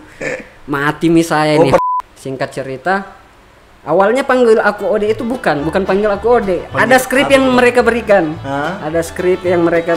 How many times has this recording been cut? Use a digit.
1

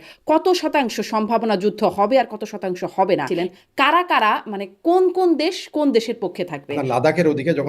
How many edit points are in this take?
2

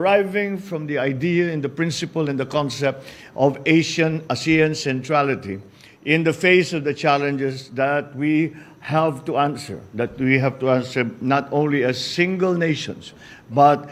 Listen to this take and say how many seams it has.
0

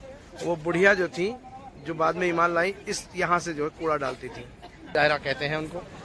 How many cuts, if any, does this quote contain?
1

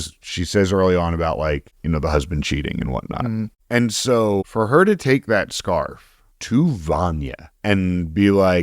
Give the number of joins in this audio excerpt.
3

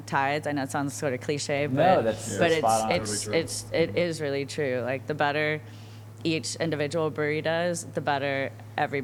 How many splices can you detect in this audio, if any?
0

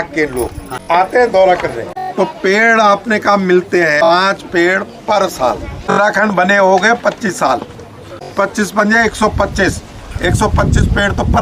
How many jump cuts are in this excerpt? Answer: 3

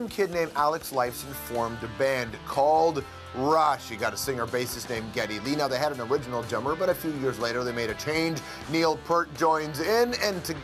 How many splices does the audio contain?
0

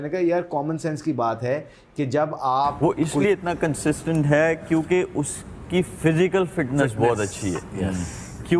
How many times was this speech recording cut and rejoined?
1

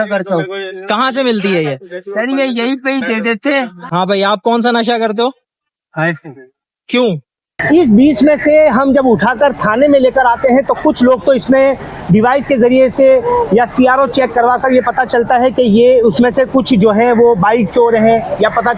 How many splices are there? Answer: 2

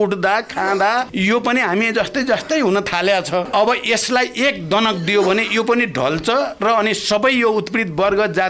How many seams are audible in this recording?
2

